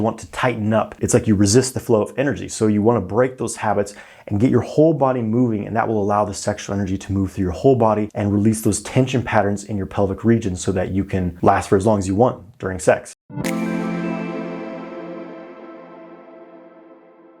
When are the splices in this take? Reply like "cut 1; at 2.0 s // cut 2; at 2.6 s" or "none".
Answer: cut 1; at 1.0 s // cut 2; at 8.1 s // cut 3; at 13.1 s